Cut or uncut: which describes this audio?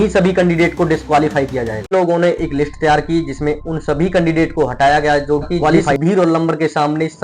cut